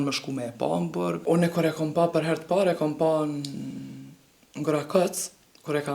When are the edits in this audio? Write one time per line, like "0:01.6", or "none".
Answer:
0:01.2